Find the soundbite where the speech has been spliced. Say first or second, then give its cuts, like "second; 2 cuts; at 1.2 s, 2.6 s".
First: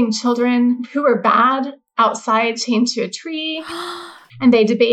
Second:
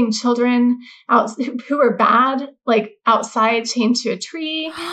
first; 3 cuts; at 0.9 s, 1.8 s, 3.9 s